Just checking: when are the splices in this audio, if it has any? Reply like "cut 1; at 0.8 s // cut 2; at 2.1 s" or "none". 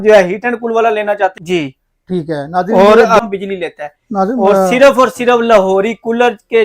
cut 1; at 1.4 s // cut 2; at 3.2 s

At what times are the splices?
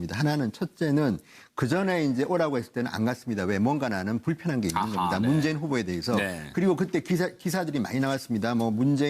cut 1; at 1.9 s

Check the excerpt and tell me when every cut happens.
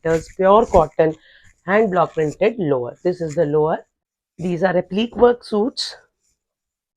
cut 1; at 4.0 s

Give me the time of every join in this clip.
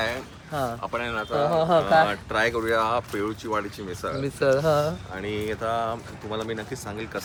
none

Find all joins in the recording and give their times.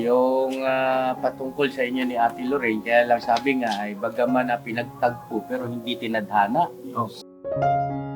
cut 1; at 7.2 s

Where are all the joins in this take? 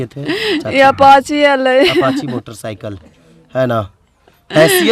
none

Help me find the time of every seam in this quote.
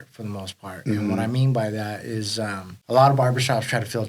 cut 1; at 2.7 s

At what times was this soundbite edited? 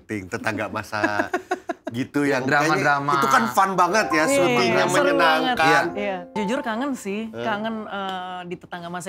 cut 1; at 6.4 s

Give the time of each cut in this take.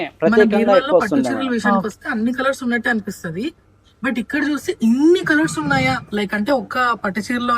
cut 1; at 1.4 s

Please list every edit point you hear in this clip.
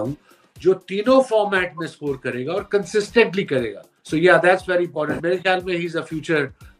none

